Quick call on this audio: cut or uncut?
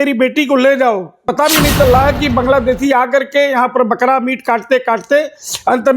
cut